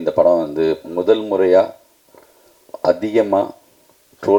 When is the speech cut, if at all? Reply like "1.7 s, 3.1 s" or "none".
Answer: none